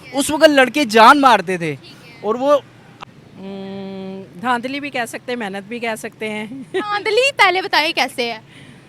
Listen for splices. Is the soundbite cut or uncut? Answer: cut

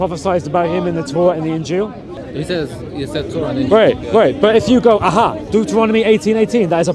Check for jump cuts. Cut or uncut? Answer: cut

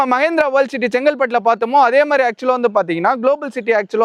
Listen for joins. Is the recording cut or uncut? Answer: uncut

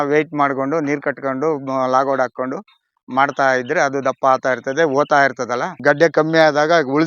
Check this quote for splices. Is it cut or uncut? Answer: cut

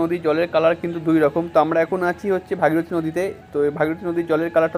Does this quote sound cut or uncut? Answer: uncut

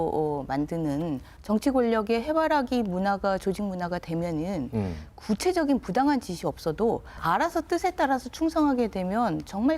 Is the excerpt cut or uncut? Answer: cut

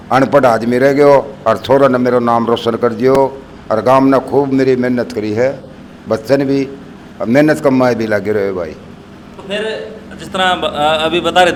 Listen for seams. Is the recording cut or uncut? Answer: uncut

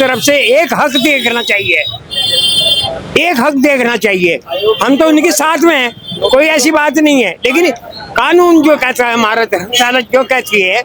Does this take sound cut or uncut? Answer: uncut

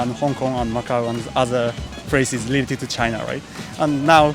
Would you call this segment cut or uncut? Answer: uncut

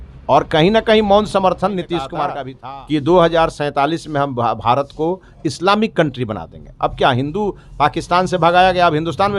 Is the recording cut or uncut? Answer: cut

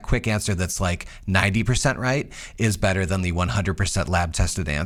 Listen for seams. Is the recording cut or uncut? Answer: uncut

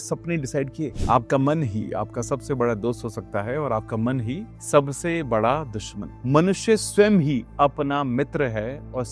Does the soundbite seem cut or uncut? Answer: cut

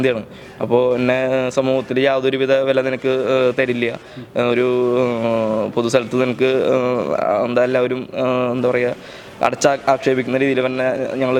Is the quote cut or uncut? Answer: uncut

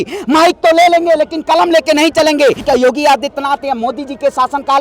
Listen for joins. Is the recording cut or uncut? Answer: cut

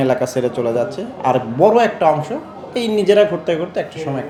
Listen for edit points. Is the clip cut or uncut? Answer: uncut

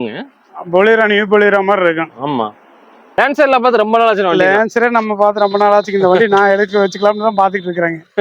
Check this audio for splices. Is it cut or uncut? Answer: cut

